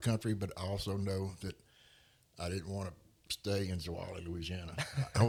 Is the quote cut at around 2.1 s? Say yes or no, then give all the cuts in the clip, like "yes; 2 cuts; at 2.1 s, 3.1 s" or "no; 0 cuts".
no; 0 cuts